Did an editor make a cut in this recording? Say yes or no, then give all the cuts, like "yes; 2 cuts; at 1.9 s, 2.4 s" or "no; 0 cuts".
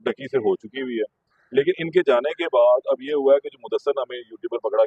no; 0 cuts